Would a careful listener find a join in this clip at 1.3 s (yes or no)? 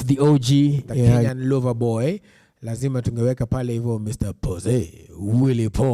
yes